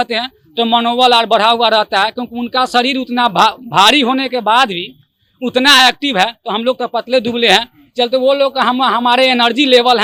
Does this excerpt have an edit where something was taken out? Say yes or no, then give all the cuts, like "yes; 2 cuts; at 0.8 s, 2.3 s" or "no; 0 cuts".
no; 0 cuts